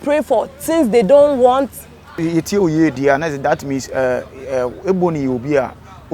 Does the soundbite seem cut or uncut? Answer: cut